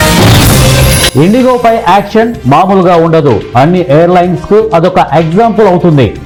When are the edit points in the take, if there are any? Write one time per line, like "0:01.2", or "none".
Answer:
none